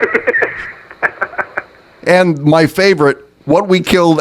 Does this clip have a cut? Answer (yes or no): yes